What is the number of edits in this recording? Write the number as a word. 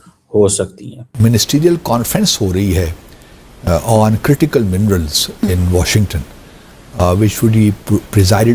one